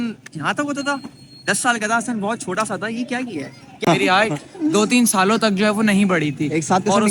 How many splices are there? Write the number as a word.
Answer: one